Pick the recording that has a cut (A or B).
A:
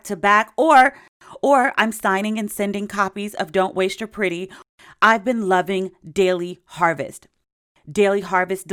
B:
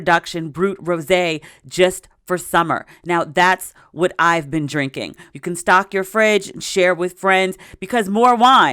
B